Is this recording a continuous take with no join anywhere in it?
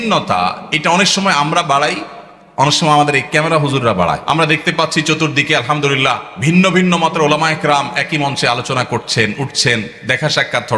no; 2 cuts; at 4.2 s, 6.3 s

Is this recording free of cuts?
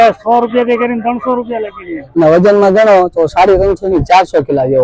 no; 1 cut; at 2.0 s

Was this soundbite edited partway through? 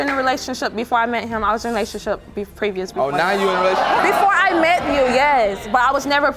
yes; 1 cut; at 4.0 s

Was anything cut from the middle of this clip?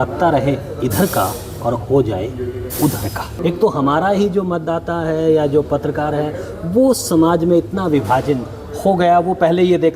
yes; 1 cut; at 3.3 s

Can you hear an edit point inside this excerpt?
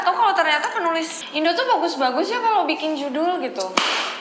yes; 1 cut; at 1.2 s

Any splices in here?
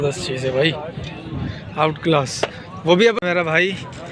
yes; 1 cut; at 3.2 s

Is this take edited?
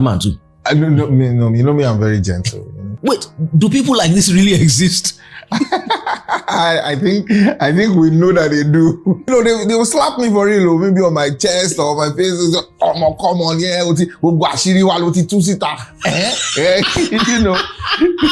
yes; 2 cuts; at 2.9 s, 9.3 s

